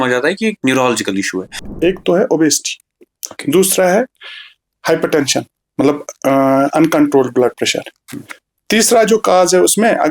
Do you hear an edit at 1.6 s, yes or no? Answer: yes